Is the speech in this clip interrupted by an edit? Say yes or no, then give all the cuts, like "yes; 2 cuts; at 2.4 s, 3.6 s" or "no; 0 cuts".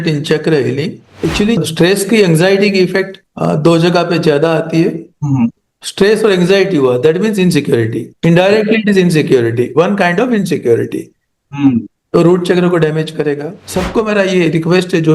yes; 2 cuts; at 1.1 s, 13.6 s